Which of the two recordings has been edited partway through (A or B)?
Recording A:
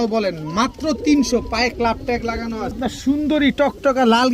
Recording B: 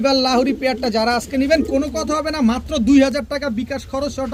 A